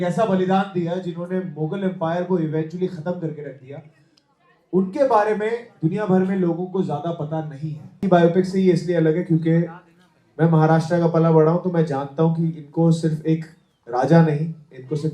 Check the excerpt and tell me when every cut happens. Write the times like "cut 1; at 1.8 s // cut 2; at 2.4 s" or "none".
cut 1; at 8.0 s